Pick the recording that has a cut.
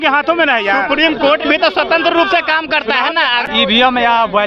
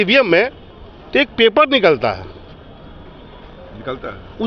first; 1 cut; at 3.4 s

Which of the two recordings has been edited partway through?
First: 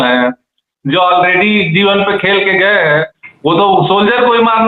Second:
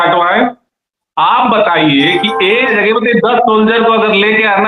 second; 1 cut; at 2.7 s

